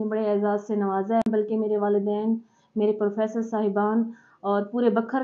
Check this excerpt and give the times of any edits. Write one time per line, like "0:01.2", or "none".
0:01.2

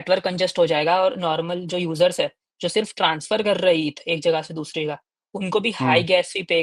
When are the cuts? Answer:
none

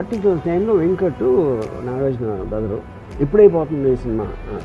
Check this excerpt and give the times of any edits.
0:03.0

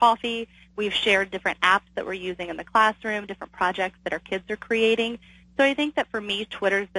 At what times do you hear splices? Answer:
none

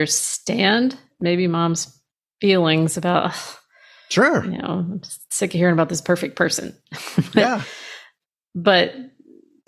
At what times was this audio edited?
none

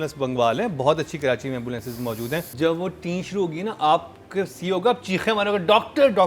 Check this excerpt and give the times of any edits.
0:02.5

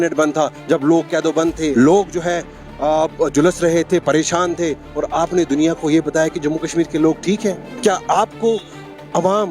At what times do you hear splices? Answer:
0:01.7
0:07.7

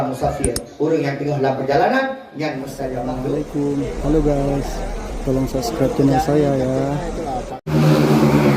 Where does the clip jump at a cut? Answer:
0:03.4
0:07.7

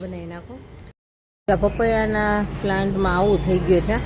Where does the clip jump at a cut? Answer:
0:01.0

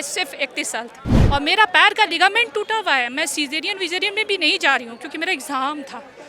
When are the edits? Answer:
0:01.1

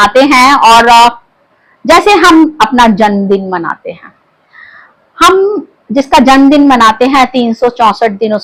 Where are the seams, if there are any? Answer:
none

